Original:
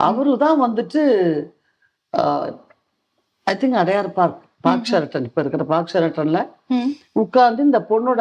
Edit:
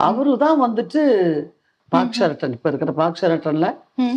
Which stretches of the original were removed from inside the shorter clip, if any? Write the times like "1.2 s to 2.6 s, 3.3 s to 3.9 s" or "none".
1.7 s to 4.5 s